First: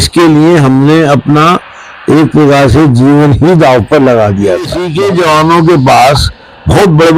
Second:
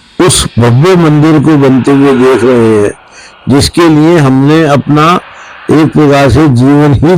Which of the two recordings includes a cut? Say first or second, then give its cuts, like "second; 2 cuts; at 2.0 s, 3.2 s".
first; 1 cut; at 4.8 s